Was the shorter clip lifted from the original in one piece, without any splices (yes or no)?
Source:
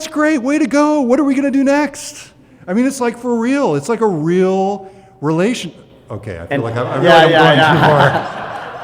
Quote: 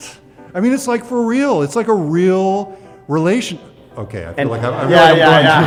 yes